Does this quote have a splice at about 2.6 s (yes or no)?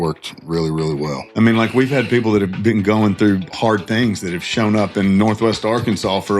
no